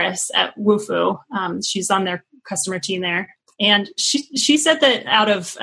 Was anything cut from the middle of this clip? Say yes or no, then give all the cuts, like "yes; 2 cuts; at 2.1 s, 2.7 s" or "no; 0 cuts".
yes; 1 cut; at 3.4 s